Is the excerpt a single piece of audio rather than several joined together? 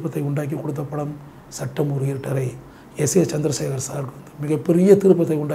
yes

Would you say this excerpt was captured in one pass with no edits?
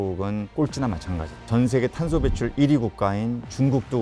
no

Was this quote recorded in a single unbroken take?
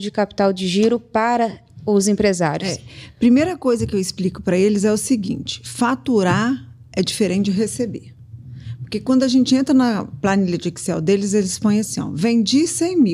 yes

